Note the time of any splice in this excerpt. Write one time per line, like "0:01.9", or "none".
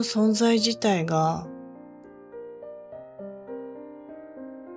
0:01.4